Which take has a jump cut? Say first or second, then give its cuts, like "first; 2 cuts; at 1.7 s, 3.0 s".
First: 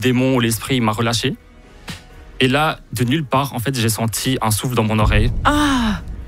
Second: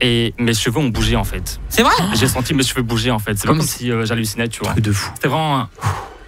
second; 2 cuts; at 2.1 s, 4.7 s